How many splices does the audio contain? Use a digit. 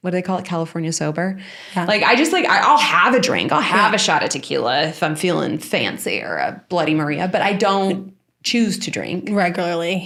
0